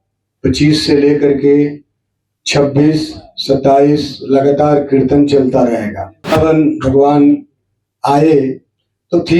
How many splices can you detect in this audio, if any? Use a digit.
1